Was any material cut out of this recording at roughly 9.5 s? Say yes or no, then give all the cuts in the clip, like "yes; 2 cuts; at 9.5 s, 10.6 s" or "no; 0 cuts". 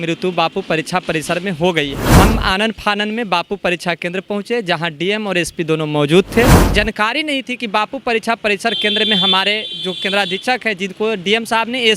no; 2 cuts; at 2.0 s, 6.6 s